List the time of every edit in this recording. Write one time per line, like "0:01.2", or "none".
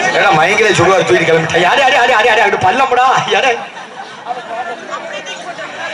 none